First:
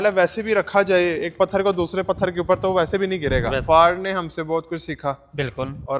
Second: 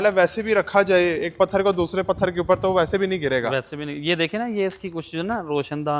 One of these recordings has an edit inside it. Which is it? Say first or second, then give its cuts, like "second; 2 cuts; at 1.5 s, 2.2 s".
first; 1 cut; at 3.6 s